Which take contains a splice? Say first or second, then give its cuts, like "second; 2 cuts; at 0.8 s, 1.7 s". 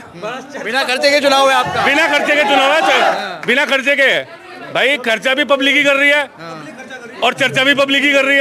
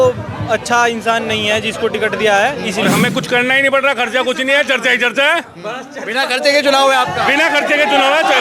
second; 1 cut; at 2.9 s